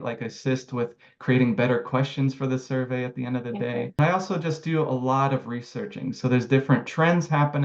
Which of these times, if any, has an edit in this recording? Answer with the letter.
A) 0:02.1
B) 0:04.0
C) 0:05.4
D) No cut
B